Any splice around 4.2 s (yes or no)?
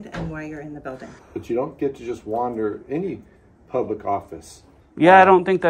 no